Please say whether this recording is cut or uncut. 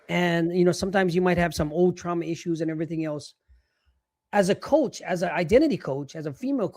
uncut